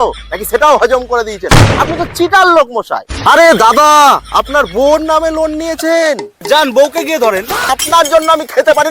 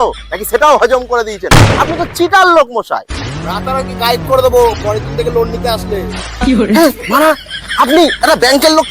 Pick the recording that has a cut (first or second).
first